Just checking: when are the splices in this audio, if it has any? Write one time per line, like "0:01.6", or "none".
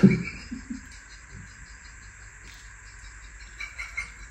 none